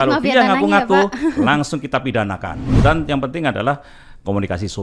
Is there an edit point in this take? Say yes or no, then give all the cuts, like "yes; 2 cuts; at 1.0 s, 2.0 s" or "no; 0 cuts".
yes; 1 cut; at 2.5 s